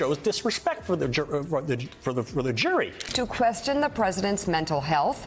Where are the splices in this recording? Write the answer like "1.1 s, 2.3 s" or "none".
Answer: 3.0 s